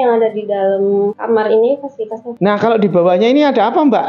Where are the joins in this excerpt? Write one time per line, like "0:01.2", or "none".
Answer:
0:01.2
0:02.3